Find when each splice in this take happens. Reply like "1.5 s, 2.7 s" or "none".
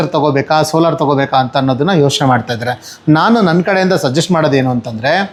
none